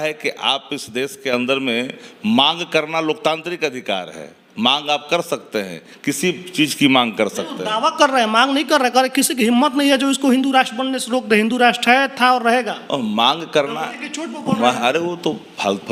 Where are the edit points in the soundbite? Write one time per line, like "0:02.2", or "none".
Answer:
none